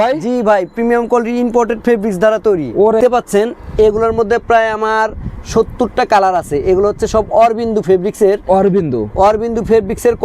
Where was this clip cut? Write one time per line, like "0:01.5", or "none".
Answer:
0:03.0